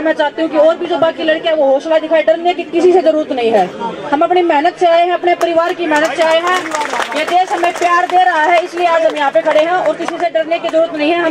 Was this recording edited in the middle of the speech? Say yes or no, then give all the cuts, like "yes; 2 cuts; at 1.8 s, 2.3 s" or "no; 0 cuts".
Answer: no; 0 cuts